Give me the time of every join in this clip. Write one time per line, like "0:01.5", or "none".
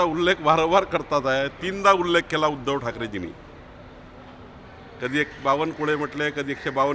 none

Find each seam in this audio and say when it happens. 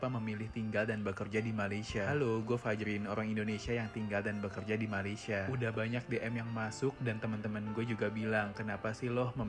none

